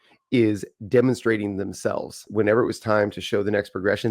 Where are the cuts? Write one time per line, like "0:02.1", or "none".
0:02.2